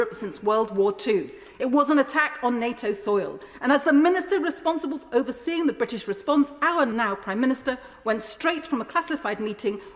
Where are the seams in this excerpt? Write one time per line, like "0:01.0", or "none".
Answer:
0:06.9